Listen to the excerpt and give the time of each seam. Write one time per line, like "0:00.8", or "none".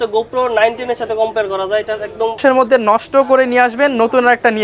0:02.4